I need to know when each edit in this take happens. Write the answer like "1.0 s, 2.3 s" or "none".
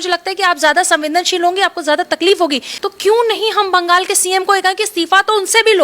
2.7 s